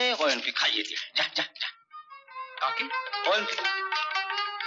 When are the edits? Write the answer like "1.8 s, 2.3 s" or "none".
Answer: none

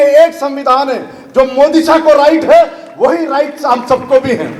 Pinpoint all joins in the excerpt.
none

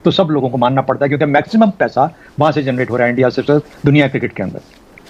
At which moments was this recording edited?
none

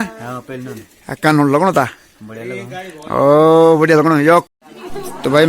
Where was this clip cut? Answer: 4.4 s

